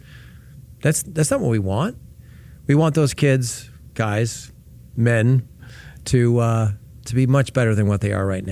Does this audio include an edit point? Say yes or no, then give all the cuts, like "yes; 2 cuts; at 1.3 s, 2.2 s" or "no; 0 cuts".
no; 0 cuts